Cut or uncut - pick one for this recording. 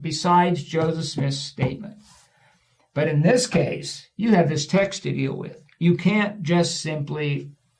uncut